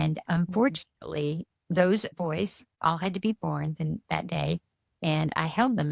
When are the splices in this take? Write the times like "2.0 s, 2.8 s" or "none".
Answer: 2.7 s